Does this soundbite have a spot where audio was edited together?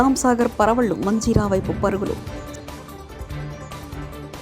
yes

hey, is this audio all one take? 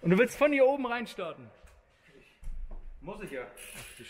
yes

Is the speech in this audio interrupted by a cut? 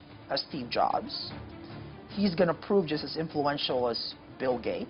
no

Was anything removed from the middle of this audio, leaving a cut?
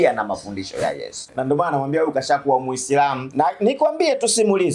yes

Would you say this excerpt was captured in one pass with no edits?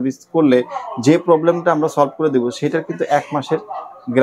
yes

